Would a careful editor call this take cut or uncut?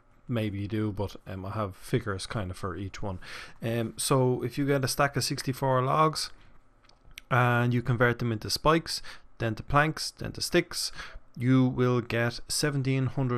cut